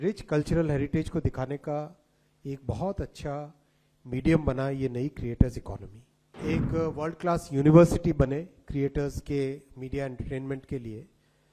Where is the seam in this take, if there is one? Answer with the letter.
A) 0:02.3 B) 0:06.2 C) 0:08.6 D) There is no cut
B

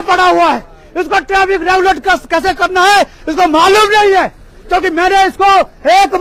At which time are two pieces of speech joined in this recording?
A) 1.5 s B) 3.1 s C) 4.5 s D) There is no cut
D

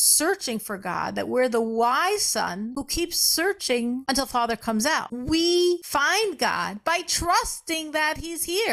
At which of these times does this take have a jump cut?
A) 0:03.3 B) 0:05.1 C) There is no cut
B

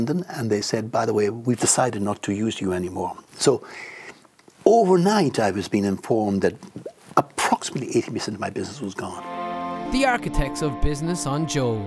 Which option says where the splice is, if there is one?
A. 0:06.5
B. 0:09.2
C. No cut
B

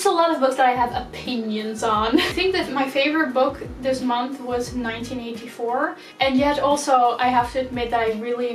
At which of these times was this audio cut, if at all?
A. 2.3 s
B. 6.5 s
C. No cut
C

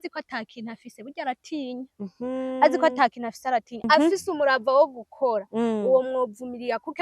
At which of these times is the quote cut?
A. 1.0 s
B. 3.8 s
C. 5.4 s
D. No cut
B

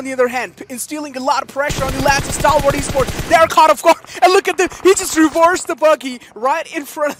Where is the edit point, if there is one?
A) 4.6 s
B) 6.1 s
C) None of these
C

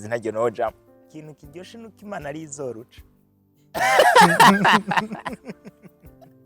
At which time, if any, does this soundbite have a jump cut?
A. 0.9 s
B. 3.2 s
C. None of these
A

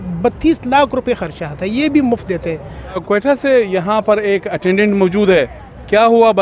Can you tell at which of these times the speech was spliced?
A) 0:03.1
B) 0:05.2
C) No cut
A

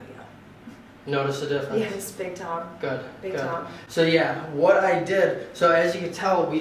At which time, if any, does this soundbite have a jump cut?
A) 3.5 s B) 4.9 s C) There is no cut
C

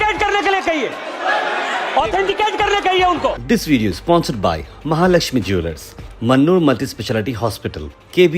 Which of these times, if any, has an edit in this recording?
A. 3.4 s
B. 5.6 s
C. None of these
A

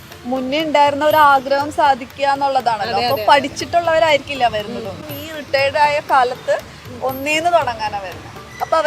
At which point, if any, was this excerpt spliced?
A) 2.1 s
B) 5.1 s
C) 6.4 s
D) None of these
B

